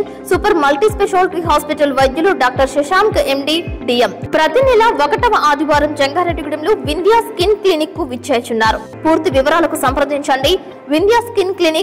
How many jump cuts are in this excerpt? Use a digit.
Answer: 2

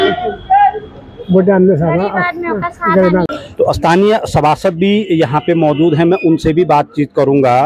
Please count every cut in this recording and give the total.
0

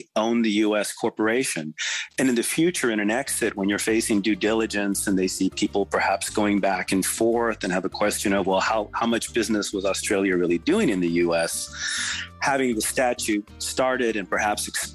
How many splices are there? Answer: 0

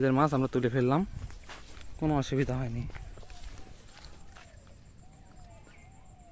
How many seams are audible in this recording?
0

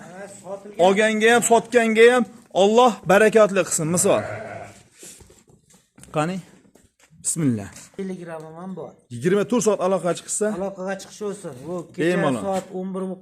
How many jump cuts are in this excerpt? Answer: 1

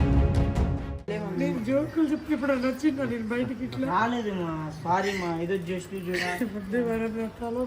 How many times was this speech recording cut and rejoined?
1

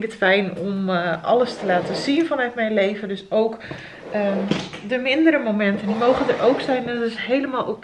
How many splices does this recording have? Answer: 0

